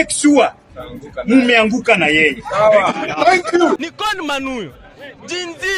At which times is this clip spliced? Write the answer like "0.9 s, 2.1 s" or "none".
3.9 s